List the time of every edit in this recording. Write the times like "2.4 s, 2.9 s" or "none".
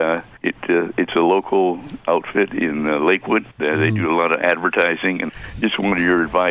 3.5 s, 5.2 s